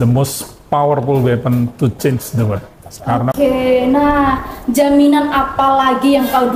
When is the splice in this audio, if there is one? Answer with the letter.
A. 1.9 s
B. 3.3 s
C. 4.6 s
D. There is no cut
B